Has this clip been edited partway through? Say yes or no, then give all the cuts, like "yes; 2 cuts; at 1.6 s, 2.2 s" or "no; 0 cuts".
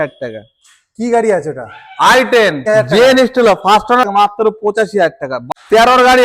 yes; 3 cuts; at 2.6 s, 4.0 s, 5.4 s